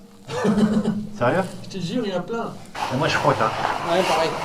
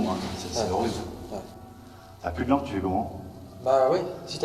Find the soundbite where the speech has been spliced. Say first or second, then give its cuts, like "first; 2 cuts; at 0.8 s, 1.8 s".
first; 1 cut; at 2.7 s